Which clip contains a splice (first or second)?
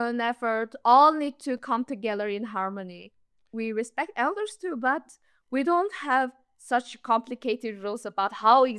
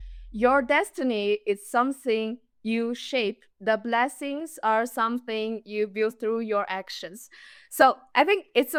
first